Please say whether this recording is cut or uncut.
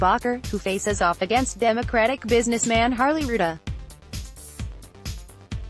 cut